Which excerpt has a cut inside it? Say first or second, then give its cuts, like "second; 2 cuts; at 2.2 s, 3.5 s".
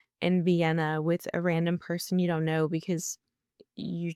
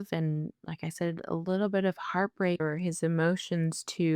second; 1 cut; at 2.6 s